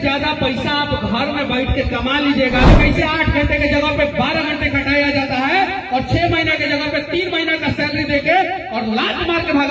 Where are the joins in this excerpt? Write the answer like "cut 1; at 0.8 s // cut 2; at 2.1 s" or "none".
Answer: cut 1; at 2.7 s